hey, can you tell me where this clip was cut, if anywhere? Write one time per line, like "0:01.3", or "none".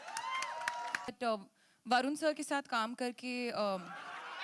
0:01.1